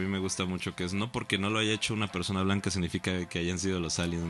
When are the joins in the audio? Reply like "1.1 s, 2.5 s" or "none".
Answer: none